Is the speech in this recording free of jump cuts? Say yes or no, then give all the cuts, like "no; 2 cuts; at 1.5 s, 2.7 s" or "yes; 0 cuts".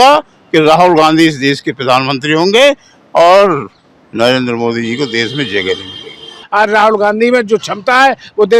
no; 1 cut; at 6.4 s